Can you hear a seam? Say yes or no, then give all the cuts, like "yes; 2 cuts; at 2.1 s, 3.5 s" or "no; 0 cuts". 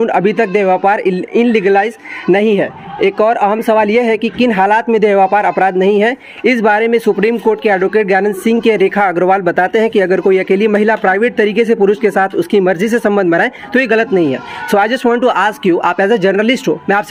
no; 0 cuts